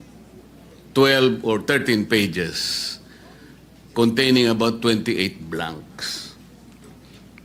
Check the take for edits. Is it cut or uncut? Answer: uncut